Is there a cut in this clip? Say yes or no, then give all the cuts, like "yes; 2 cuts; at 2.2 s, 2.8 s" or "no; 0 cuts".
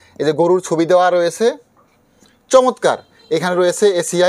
no; 0 cuts